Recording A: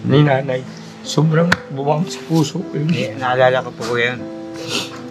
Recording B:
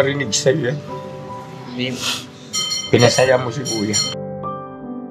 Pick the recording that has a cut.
B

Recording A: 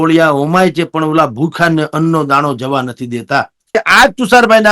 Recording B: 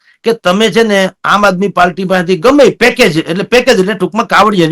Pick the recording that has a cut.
A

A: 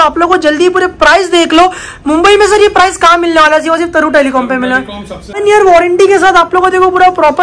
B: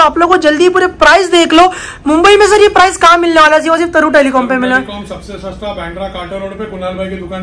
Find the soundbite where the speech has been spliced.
A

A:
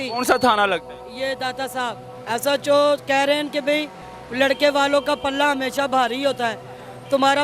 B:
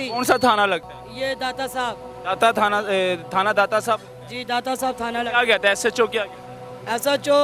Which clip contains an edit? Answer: A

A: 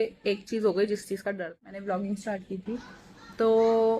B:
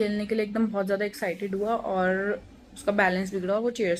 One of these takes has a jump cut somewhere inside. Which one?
A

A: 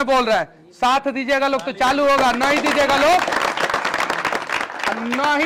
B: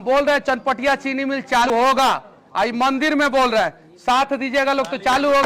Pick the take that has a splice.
B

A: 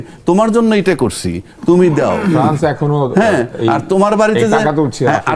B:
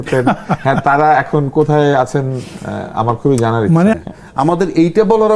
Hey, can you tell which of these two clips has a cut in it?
B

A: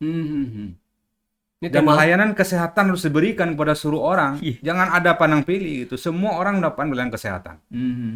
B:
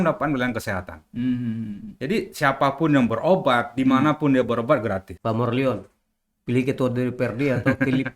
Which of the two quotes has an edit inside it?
B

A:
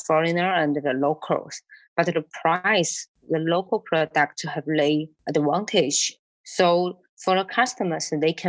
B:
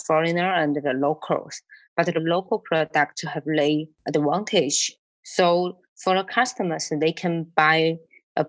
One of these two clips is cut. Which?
B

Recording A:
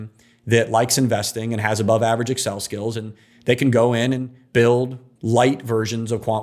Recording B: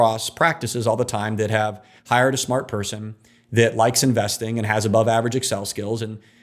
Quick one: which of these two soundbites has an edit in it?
A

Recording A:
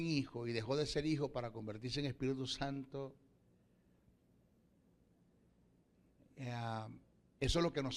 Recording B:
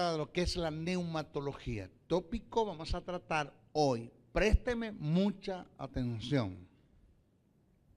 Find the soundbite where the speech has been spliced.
B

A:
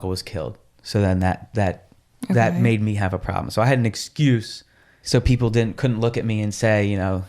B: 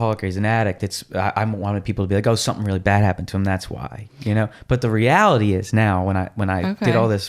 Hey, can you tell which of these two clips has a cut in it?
A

